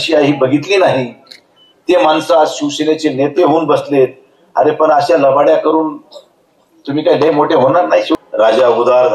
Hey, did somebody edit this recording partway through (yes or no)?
yes